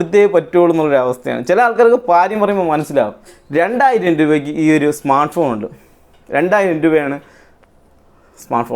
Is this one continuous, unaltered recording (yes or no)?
no